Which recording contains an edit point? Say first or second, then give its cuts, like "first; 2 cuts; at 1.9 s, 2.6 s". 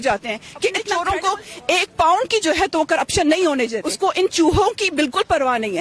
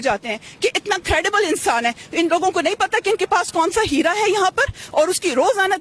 first; 2 cuts; at 0.9 s, 3.8 s